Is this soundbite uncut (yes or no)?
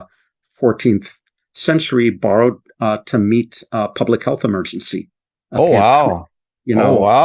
yes